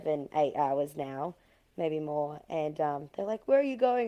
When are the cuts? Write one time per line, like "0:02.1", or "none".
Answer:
none